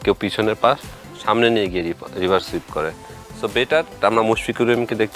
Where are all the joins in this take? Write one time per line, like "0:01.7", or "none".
none